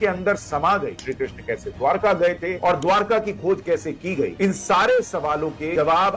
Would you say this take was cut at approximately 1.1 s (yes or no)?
yes